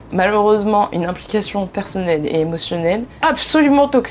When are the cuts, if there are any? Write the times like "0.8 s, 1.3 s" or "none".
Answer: 3.1 s